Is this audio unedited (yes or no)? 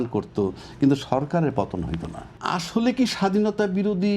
no